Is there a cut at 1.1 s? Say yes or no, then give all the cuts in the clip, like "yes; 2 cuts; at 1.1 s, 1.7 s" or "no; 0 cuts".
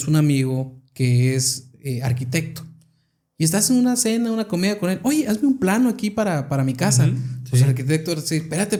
no; 0 cuts